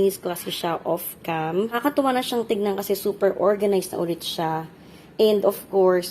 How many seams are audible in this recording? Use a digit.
1